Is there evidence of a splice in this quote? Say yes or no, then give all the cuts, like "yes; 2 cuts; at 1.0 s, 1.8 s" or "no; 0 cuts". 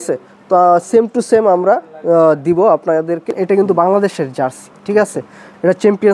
yes; 1 cut; at 3.3 s